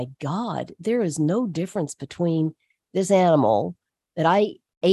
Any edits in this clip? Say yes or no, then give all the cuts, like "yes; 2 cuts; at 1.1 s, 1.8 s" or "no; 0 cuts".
no; 0 cuts